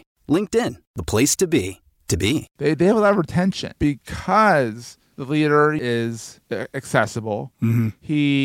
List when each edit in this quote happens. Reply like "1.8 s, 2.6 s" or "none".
2.5 s, 3.7 s, 5.8 s